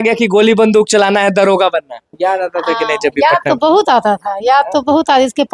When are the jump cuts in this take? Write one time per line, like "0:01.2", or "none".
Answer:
0:02.1